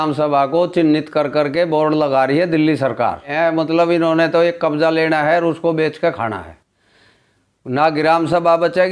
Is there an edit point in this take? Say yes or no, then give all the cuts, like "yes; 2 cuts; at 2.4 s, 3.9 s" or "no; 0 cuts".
yes; 1 cut; at 3.3 s